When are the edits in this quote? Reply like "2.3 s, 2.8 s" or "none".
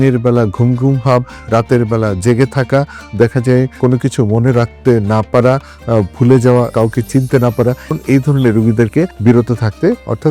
7.9 s, 9.1 s